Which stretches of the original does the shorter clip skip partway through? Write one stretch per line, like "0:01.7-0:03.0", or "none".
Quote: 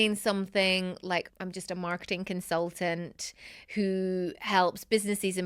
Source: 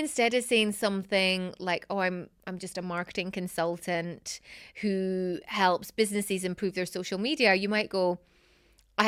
0:01.8-0:02.3